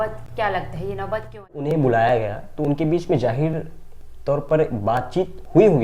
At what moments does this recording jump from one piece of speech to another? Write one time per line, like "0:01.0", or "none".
0:01.6